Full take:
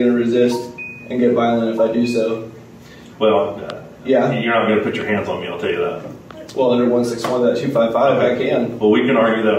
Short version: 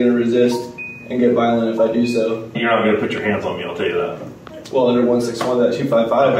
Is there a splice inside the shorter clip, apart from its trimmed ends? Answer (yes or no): yes